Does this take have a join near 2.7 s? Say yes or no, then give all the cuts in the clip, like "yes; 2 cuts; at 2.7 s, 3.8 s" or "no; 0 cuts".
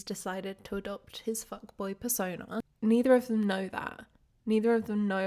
yes; 1 cut; at 2.7 s